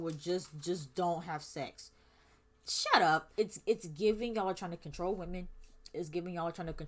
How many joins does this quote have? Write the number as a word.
one